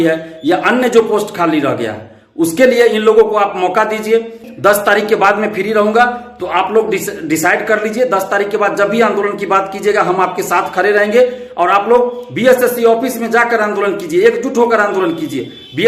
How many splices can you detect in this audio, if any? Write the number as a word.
one